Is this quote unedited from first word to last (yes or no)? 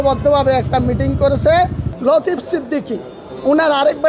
no